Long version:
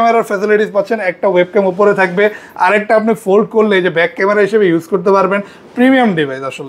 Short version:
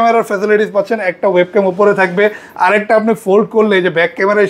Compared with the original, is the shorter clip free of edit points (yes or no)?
yes